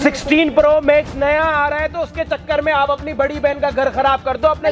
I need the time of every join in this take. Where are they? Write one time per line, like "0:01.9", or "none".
none